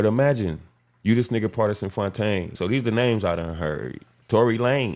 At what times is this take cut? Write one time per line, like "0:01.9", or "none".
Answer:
0:02.5

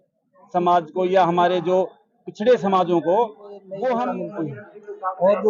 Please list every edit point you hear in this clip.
0:04.2

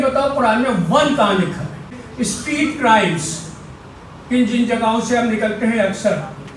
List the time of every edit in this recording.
0:02.0

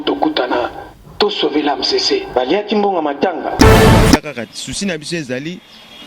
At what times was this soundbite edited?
0:04.2

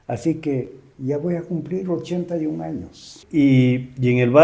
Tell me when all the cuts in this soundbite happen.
0:03.1

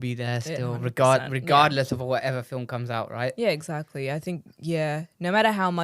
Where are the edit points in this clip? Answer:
none

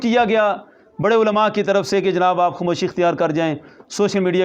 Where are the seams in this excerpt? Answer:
none

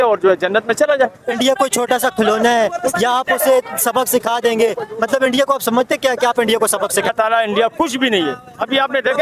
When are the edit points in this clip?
0:01.2
0:07.1

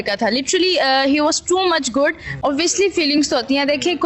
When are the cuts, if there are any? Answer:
0:02.3

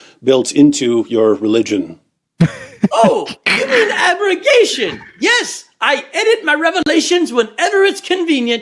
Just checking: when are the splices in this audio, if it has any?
0:06.9

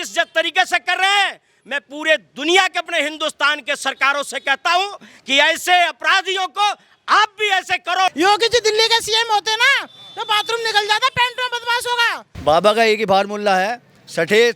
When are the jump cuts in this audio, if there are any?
0:08.1
0:12.3

